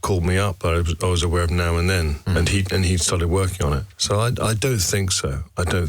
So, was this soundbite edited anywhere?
yes; 2 cuts; at 2.2 s, 3.9 s

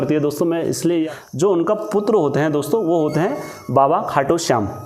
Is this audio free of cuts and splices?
no; 1 cut; at 1.1 s

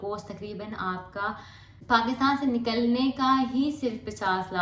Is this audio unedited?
yes; 0 cuts

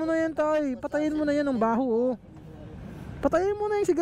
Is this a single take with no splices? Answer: yes; 0 cuts

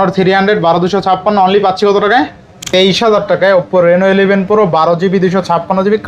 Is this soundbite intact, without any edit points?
no; 1 cut; at 2.7 s

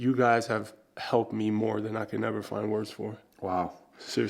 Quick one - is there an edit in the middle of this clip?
no; 0 cuts

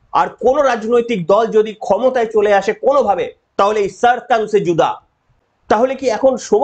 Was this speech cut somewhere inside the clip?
yes; 1 cut; at 5.5 s

